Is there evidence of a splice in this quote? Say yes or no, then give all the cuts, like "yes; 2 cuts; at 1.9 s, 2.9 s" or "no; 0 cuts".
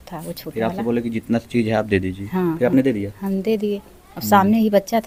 no; 0 cuts